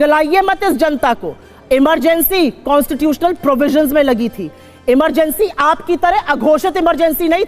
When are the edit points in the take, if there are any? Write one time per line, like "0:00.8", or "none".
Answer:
none